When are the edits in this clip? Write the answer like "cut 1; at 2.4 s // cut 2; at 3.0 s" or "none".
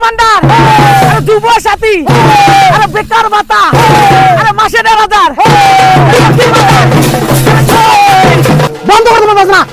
cut 1; at 8.7 s